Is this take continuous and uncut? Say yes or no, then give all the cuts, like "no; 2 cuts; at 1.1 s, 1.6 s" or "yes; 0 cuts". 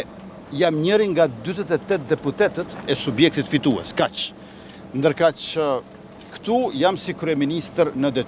yes; 0 cuts